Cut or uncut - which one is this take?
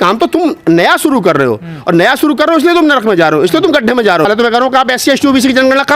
cut